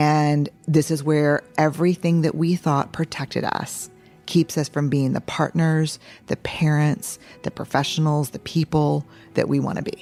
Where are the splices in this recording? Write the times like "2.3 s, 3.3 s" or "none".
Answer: none